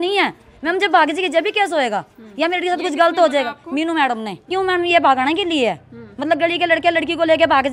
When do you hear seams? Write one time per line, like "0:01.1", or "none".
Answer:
0:04.5